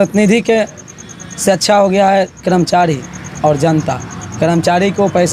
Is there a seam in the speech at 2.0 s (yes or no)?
no